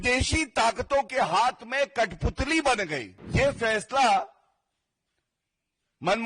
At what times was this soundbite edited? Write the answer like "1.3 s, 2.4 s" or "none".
3.1 s